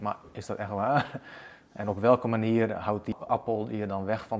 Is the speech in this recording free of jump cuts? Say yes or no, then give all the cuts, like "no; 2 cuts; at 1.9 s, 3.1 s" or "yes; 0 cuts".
no; 1 cut; at 3.1 s